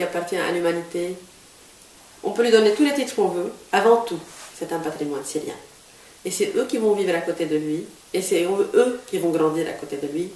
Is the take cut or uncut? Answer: cut